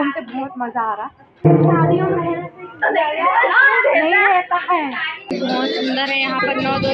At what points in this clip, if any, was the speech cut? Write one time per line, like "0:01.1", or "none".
0:01.4
0:05.3